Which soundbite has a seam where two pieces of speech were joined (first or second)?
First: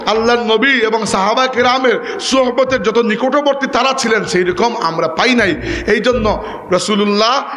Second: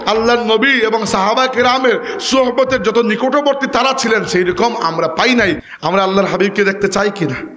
second